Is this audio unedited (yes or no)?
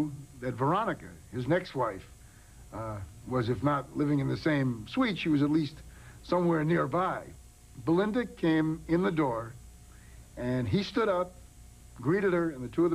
no